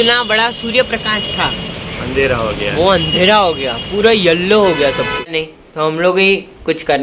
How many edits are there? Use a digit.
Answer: 1